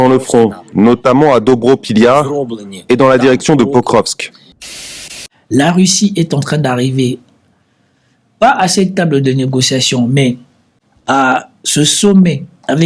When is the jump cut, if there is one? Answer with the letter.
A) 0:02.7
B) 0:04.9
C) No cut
B